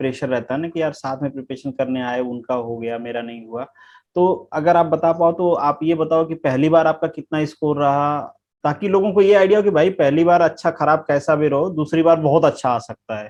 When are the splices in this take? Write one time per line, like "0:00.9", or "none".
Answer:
none